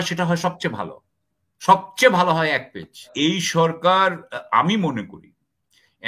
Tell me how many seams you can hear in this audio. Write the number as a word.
one